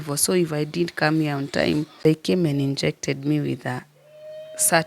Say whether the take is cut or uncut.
cut